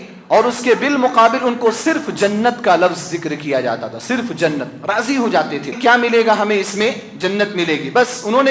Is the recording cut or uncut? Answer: cut